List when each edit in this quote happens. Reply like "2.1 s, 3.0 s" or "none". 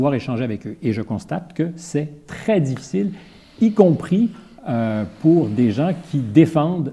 none